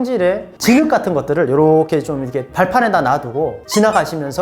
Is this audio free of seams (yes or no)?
yes